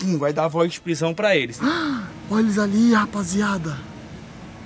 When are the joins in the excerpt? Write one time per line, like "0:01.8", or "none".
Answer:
0:01.5